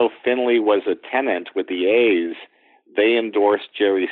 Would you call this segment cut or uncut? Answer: uncut